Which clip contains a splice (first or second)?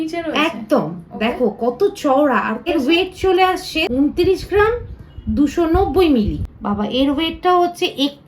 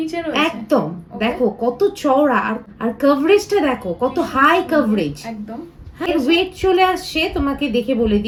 first